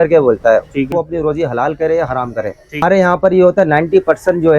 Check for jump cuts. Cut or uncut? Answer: cut